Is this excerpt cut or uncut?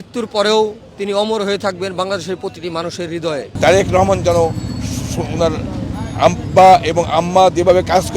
cut